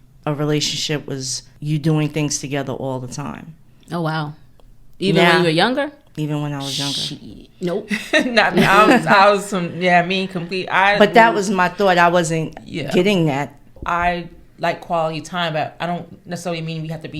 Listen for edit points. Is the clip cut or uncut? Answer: cut